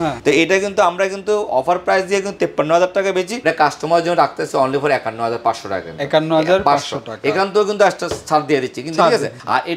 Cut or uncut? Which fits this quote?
uncut